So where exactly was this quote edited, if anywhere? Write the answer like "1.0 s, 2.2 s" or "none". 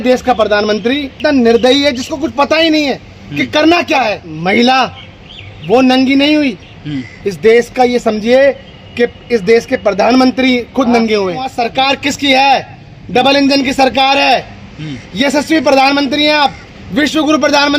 1.1 s, 4.3 s, 11.5 s